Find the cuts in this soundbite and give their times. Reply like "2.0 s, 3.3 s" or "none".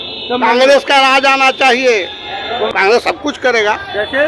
2.7 s

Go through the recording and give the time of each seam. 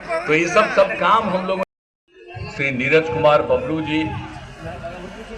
1.8 s

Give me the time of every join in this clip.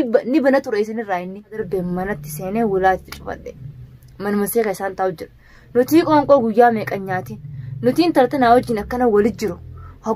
1.6 s

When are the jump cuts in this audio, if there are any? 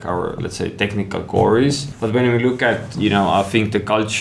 1.9 s

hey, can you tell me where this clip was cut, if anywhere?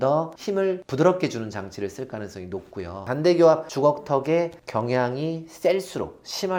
3.0 s

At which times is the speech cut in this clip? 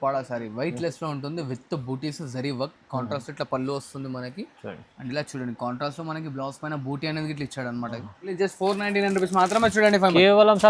8.3 s

